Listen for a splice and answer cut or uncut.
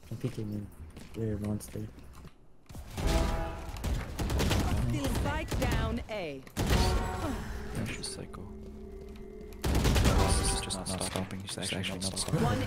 uncut